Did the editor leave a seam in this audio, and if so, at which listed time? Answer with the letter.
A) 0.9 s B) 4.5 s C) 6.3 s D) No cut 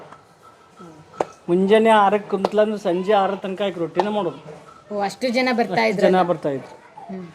D